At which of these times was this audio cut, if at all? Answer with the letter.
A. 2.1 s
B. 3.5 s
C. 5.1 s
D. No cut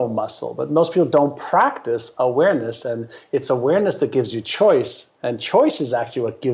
D